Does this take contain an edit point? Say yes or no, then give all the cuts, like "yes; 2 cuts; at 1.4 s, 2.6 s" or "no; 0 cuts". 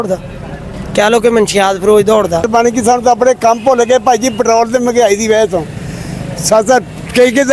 yes; 1 cut; at 2.5 s